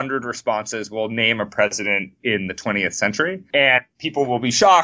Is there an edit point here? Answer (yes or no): yes